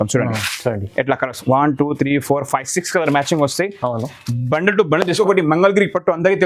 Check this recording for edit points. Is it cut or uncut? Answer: cut